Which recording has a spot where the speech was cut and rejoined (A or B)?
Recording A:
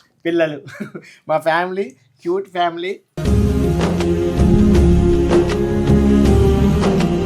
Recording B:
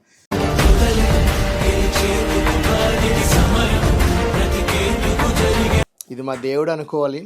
B